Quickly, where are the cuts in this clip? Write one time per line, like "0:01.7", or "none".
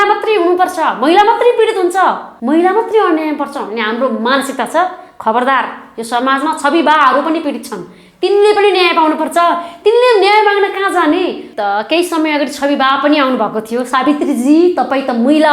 0:02.3
0:11.5